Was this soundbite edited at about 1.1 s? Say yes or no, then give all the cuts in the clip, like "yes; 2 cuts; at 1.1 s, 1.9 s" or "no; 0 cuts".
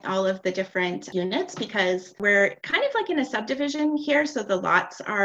yes; 2 cuts; at 1.1 s, 2.2 s